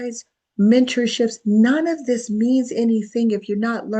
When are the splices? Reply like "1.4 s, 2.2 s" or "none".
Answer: none